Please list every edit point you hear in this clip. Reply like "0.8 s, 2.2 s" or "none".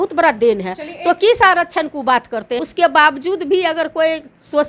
2.5 s